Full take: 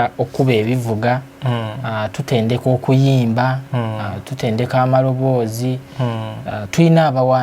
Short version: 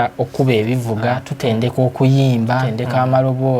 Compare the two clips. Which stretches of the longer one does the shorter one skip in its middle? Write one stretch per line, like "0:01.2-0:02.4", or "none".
0:01.3-0:02.2
0:03.6-0:04.6